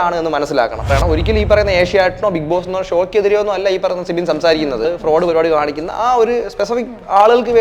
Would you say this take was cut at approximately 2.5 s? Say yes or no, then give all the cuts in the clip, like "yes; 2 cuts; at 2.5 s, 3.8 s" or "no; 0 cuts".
no; 2 cuts; at 0.9 s, 4.8 s